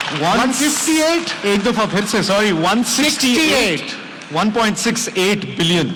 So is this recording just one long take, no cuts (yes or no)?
yes